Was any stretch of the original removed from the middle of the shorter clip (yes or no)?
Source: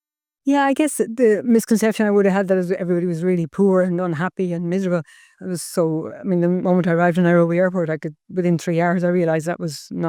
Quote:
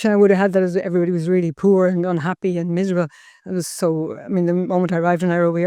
no